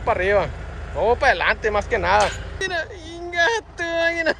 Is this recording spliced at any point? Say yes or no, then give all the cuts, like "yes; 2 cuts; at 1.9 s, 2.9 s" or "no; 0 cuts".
yes; 1 cut; at 2.5 s